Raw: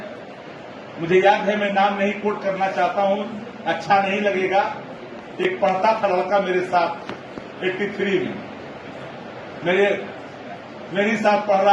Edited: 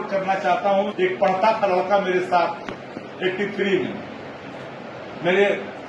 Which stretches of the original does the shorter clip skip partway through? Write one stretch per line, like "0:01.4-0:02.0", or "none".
0:03.4-0:05.4